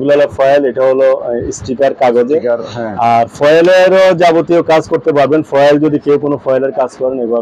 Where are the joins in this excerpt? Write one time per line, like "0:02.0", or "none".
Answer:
none